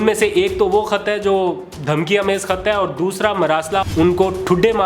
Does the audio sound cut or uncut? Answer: cut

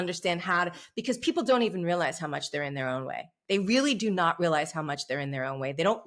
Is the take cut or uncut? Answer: uncut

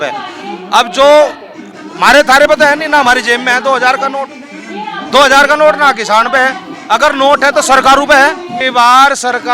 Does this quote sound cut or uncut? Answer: cut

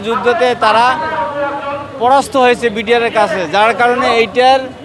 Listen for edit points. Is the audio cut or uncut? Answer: uncut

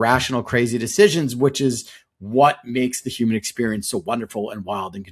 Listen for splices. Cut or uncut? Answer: uncut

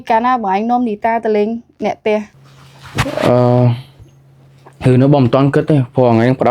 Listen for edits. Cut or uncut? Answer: uncut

